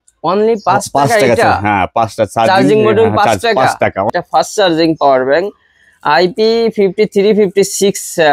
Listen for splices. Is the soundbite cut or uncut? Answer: cut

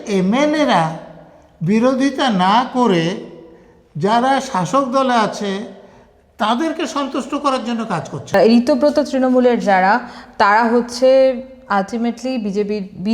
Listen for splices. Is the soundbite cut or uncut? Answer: cut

